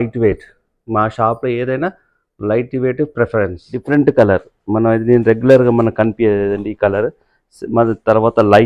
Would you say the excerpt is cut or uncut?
cut